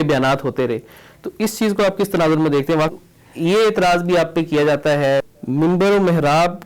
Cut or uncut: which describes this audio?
cut